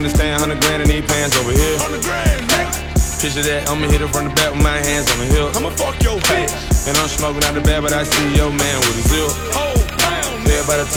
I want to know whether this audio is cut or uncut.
uncut